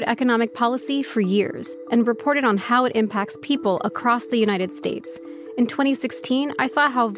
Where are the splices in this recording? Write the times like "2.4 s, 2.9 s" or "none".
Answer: 1.5 s